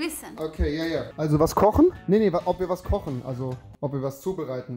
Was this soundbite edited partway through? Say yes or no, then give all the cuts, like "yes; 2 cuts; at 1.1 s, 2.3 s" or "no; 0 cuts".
yes; 1 cut; at 1.1 s